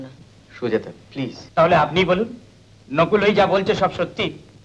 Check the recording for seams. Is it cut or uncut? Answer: cut